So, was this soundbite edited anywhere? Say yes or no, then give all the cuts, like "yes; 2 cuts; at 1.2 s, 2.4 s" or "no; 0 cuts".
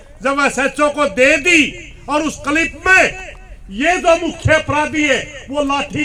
no; 0 cuts